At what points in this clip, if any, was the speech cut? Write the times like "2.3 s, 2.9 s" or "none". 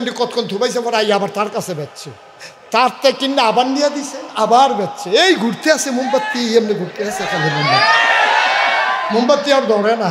none